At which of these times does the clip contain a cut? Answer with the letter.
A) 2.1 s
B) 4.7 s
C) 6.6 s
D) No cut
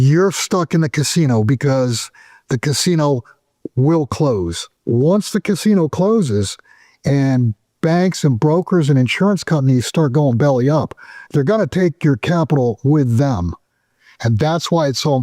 B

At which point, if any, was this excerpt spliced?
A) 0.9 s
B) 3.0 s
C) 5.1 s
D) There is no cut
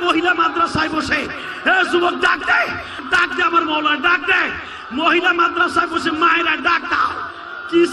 B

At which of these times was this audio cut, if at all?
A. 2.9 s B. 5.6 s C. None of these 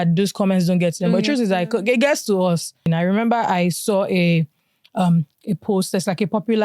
A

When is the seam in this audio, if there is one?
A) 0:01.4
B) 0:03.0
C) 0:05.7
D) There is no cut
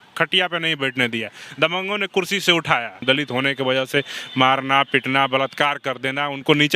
B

